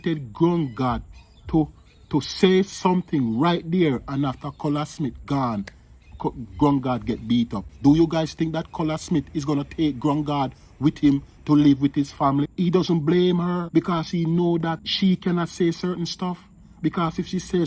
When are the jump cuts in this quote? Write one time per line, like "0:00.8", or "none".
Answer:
0:07.7
0:12.5
0:13.7
0:14.9